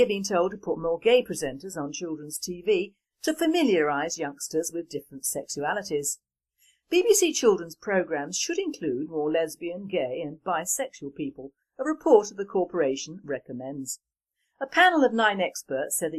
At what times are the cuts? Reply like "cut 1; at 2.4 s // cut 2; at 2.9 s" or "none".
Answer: none